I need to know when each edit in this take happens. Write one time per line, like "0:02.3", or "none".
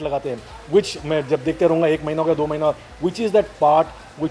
none